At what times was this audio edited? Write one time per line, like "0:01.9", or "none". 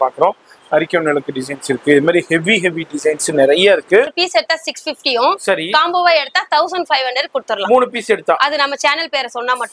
0:04.2